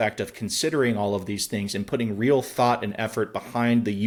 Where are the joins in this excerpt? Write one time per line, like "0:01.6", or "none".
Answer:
none